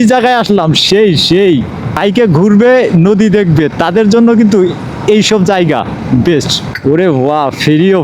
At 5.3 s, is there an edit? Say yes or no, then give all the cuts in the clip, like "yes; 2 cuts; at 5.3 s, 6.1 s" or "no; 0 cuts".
no; 2 cuts; at 2.0 s, 6.6 s